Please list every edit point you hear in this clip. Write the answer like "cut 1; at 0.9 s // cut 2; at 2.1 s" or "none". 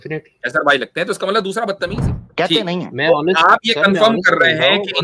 cut 1; at 2.2 s